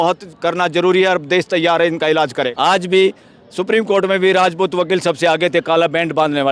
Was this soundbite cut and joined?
yes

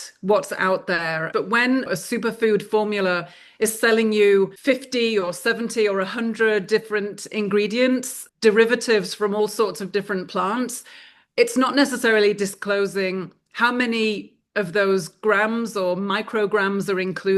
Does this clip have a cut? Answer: yes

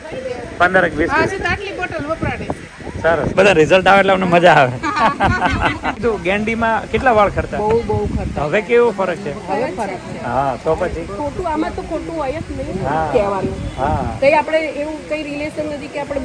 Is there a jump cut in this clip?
yes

